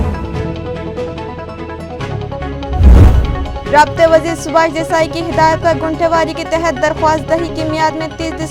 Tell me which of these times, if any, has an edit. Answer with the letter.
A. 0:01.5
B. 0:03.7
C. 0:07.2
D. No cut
B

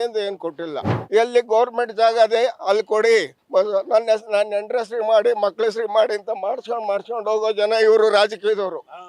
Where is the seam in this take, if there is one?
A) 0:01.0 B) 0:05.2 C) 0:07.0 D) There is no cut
A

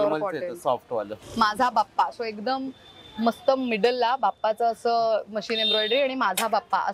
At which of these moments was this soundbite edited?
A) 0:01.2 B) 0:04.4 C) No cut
A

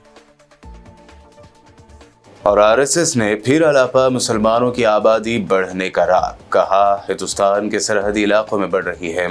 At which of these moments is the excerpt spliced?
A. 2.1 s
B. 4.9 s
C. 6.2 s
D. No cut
D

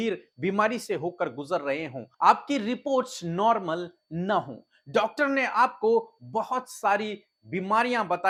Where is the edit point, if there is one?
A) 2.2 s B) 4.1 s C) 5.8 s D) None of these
D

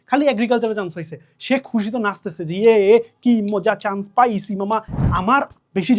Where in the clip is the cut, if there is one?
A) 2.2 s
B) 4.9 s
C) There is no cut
B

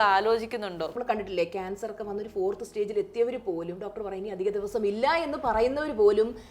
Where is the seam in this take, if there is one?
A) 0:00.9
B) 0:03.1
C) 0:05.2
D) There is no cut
A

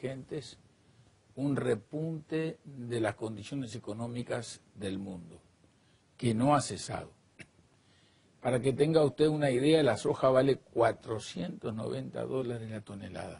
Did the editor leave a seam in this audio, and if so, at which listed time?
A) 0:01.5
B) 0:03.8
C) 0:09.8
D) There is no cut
C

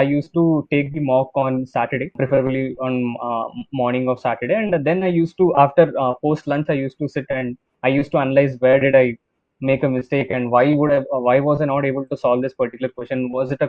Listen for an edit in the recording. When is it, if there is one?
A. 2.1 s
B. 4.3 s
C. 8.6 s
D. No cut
A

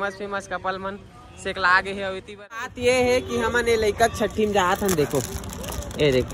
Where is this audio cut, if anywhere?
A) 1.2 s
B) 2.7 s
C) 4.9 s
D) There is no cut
B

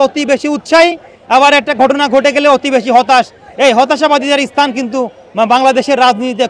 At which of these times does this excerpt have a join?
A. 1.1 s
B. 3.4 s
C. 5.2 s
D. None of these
D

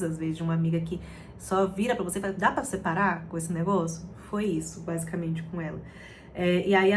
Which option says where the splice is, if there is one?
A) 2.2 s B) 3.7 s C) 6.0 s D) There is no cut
D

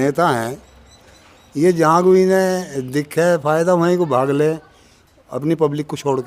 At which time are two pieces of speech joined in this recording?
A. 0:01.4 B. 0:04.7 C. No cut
C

